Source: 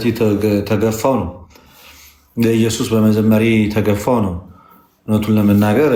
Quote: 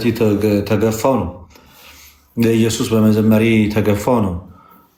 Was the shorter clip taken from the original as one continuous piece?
yes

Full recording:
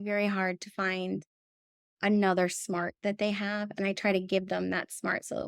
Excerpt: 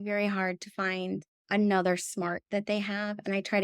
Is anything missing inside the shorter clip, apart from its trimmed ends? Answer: yes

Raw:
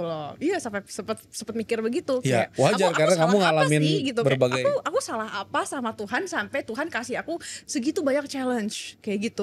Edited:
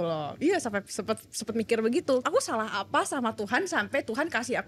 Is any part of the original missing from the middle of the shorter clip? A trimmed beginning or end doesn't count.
yes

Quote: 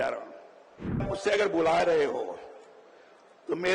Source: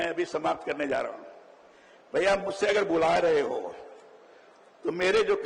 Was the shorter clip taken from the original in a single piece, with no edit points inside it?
no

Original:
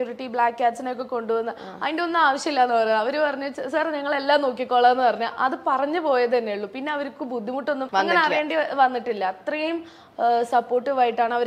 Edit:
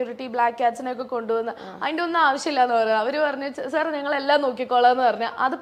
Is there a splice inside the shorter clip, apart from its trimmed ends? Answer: no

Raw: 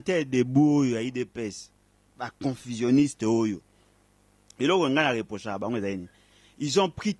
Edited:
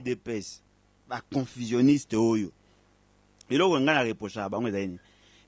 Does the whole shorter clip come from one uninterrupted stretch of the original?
yes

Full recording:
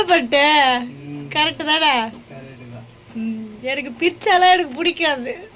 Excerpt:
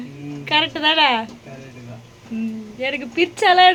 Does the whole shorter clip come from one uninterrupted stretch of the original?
yes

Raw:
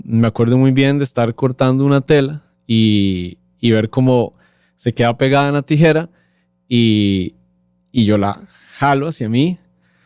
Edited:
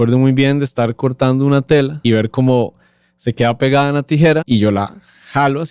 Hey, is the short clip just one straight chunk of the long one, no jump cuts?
no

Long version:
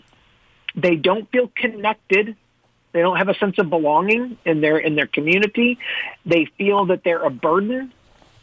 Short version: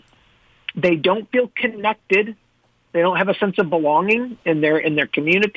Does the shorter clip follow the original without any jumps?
yes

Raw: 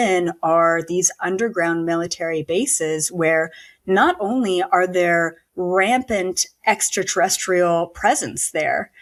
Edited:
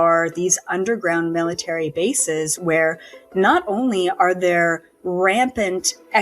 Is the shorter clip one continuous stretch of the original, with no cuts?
yes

